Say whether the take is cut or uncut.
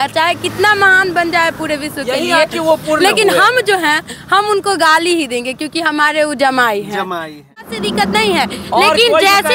cut